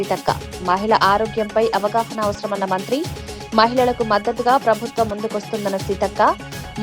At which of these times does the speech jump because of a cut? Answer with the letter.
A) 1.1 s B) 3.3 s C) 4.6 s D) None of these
D